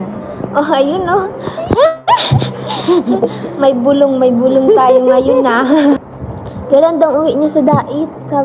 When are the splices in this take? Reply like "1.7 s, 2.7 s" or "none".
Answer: 6.0 s